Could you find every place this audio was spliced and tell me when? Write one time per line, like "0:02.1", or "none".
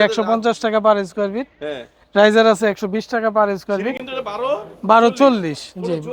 none